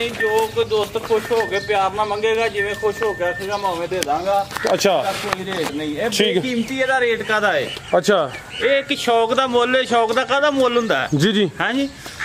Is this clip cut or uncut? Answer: uncut